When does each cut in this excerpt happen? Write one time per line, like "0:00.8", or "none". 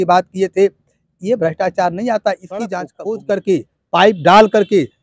0:02.9